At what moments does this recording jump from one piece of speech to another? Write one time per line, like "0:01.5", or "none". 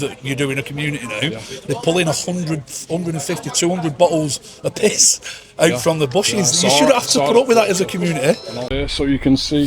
0:08.7